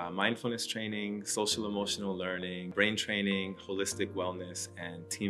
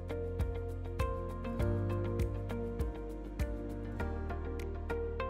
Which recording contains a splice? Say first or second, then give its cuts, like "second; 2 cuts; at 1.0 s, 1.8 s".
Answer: first; 1 cut; at 2.7 s